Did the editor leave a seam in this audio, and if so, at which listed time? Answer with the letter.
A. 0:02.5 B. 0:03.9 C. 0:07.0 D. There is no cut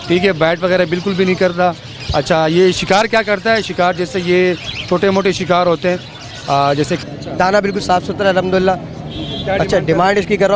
C